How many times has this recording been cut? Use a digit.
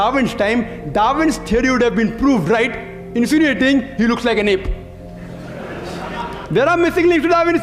0